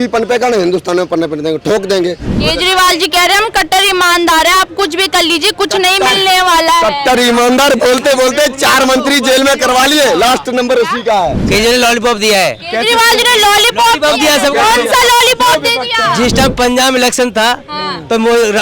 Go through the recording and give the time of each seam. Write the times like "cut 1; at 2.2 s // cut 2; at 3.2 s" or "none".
cut 1; at 2.3 s // cut 2; at 11.4 s